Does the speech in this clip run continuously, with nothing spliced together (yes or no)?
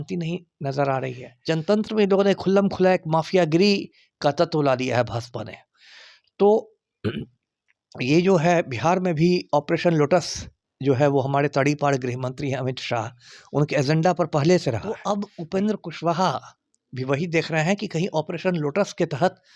no